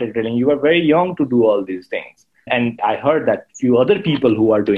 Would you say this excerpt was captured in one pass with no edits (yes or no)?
no